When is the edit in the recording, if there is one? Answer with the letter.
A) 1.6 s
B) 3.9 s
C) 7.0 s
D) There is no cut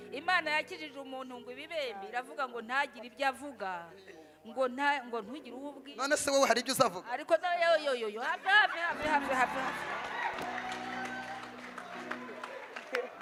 D